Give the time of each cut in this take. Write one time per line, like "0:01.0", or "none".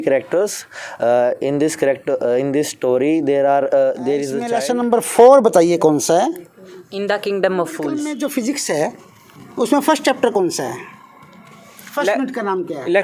0:04.5
0:08.1